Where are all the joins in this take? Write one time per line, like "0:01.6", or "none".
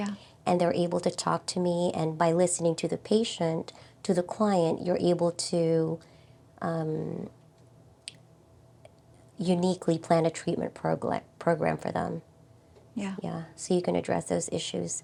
none